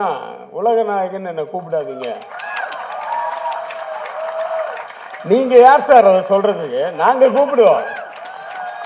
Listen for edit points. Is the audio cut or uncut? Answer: uncut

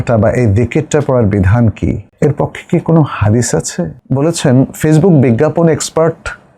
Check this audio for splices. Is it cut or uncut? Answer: cut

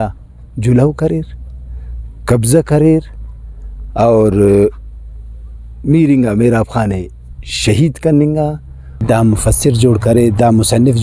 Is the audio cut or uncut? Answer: cut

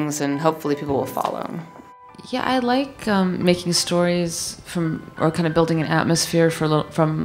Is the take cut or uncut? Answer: cut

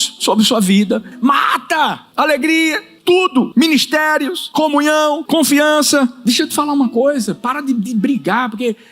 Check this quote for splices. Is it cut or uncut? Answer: cut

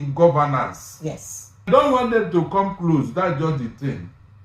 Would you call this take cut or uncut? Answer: cut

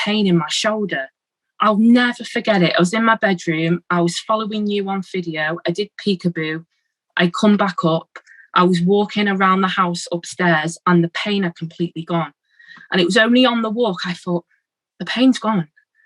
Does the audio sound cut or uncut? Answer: cut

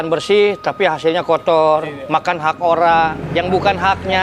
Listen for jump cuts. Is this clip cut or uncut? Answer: uncut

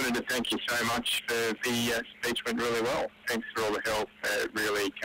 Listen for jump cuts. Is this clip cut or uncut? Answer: cut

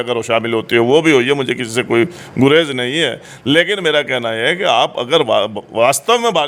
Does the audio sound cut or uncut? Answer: uncut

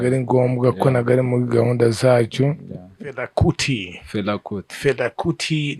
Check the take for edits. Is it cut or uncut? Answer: cut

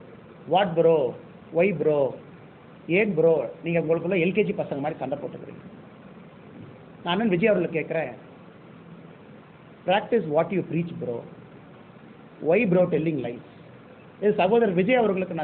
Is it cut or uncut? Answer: uncut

